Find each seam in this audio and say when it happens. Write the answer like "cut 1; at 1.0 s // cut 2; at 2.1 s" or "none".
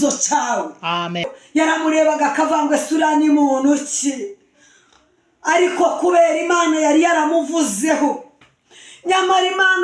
cut 1; at 1.4 s